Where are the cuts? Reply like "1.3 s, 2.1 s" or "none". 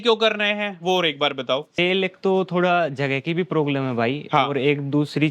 1.7 s